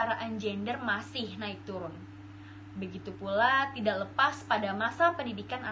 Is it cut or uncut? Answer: uncut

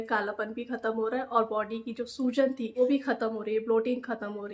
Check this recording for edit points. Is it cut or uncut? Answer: cut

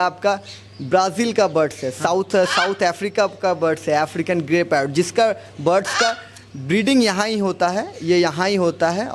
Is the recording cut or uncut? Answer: uncut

